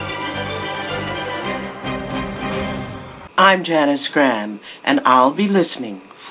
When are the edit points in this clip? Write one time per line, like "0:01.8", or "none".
0:03.0

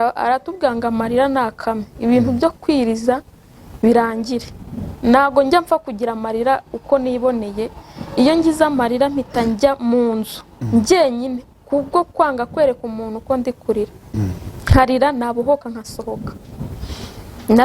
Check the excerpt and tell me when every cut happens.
none

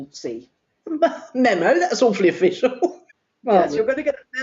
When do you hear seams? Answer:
0:03.1

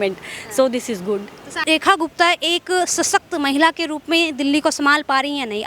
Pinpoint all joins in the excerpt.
0:01.6

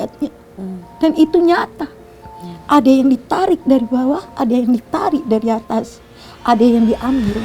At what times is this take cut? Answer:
none

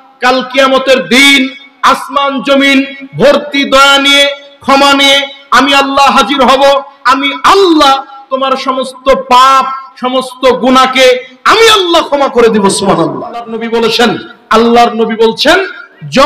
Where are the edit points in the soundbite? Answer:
0:13.5

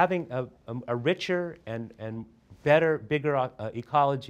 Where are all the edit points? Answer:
none

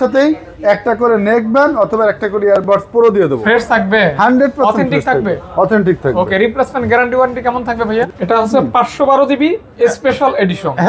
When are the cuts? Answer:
0:03.4
0:08.1

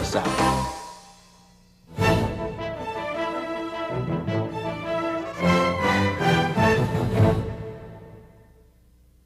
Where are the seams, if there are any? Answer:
0:03.9

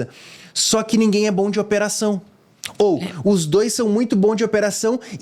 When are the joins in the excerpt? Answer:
none

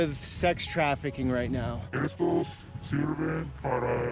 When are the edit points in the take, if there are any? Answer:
0:01.8

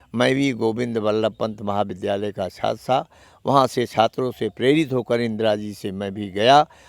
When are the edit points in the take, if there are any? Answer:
none

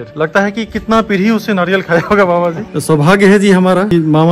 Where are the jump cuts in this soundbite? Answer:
0:02.7

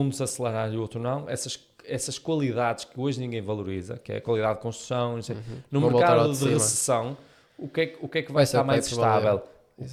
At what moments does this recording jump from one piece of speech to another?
none

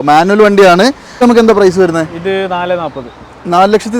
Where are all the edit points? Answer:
0:01.1

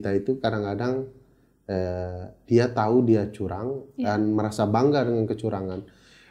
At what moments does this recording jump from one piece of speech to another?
none

